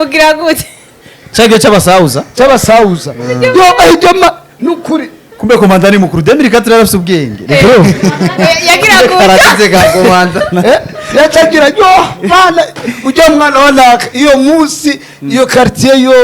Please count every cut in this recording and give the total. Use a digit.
0